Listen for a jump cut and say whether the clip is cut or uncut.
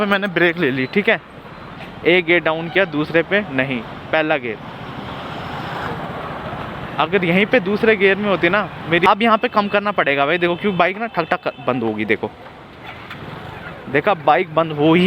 cut